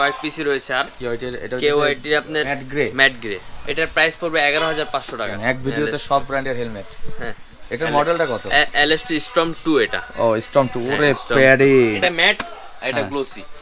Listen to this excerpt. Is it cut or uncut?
cut